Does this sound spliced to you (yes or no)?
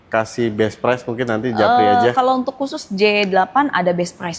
no